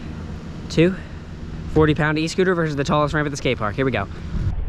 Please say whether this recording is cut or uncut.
uncut